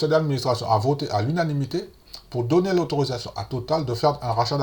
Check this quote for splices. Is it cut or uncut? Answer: uncut